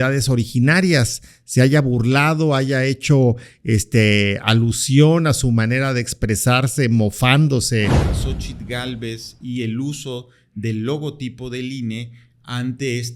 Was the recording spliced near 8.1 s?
yes; 1 cut; at 8.1 s

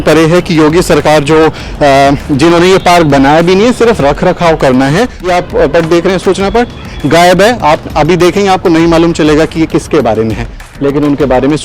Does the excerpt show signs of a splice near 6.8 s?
no; 2 cuts; at 5.3 s, 10.7 s

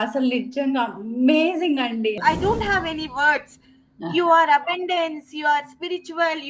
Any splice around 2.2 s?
yes; 1 cut; at 2.2 s

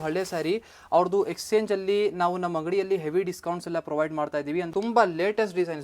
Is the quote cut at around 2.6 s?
no; 1 cut; at 4.7 s

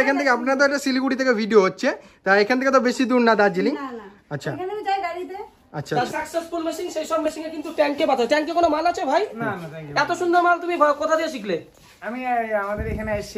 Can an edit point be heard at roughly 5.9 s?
yes; 1 cut; at 5.9 s

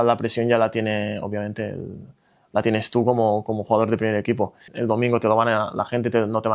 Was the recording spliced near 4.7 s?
yes; 1 cut; at 4.7 s

